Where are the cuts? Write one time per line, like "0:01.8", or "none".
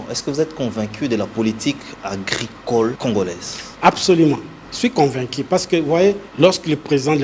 0:03.0
0:06.3